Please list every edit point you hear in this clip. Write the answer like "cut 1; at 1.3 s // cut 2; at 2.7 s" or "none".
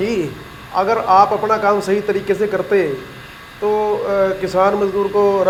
none